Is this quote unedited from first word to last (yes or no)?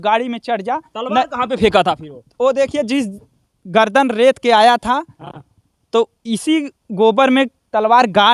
yes